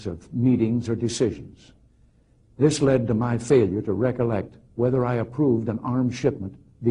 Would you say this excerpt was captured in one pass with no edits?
no; 1 cut; at 2.6 s

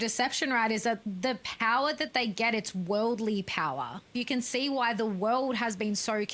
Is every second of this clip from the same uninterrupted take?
no; 2 cuts; at 1.0 s, 4.1 s

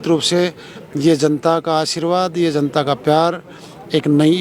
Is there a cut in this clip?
no; 0 cuts

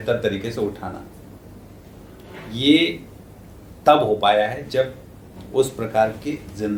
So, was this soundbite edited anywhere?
no; 0 cuts

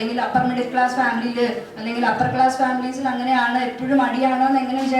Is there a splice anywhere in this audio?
no; 0 cuts

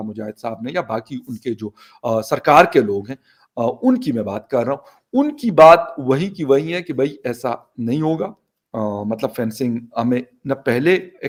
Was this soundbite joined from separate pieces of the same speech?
no; 0 cuts

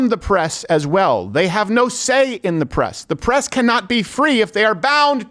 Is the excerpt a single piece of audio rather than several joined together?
yes; 0 cuts

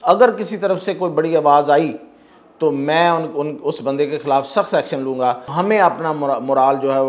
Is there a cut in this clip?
yes; 1 cut; at 5.5 s

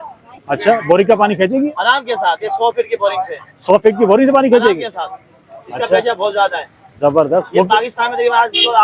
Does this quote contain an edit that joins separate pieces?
no; 0 cuts

